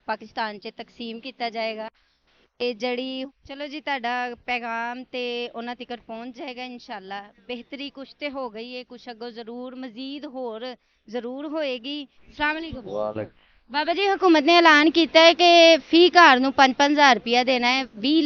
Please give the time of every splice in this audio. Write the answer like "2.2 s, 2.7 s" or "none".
3.3 s